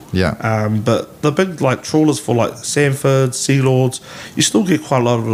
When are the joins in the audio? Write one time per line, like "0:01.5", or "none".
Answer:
none